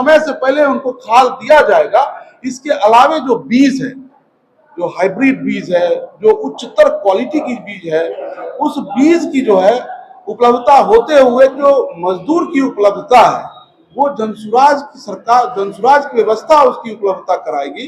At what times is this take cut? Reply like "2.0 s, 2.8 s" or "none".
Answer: 11.6 s